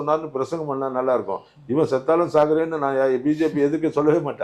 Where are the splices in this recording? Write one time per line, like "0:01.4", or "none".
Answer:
none